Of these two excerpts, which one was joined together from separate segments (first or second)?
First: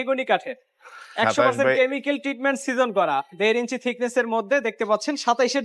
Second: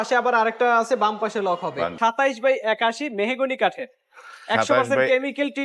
second